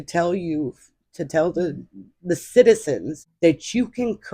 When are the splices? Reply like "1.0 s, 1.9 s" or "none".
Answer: 3.2 s